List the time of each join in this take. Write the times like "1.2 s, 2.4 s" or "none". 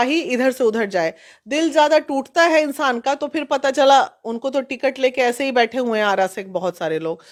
none